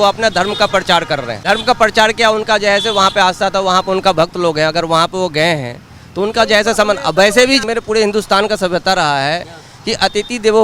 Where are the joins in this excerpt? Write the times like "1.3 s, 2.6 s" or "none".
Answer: 1.3 s, 7.6 s